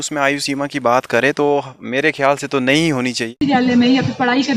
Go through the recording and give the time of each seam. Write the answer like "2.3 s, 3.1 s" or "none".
3.3 s